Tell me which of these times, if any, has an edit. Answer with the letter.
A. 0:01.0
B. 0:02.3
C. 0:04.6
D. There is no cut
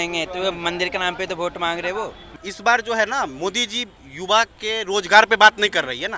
B